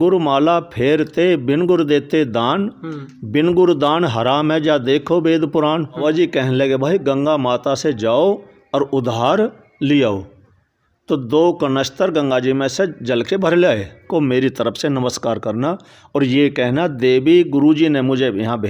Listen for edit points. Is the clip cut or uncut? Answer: cut